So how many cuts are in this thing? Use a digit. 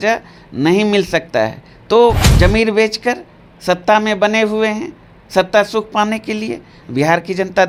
0